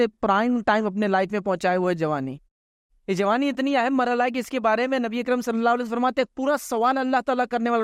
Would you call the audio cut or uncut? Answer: uncut